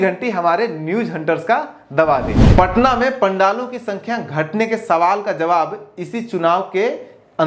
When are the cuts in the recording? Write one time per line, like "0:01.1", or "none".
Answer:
0:02.4